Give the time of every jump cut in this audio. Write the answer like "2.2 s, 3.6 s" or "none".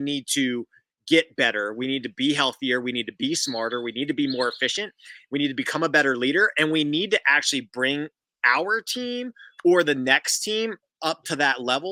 none